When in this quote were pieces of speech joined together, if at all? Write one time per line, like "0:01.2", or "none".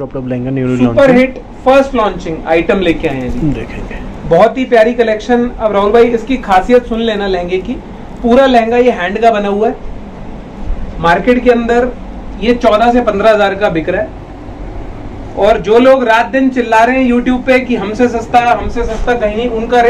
none